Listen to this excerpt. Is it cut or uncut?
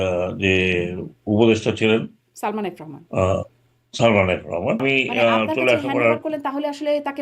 cut